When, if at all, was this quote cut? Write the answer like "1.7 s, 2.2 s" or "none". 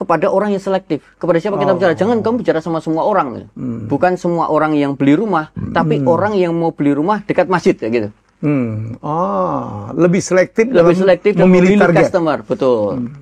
none